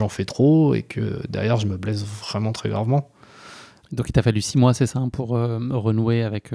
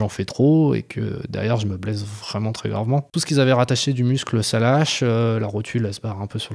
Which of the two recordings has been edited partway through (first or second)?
second